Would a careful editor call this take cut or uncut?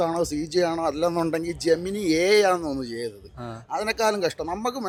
uncut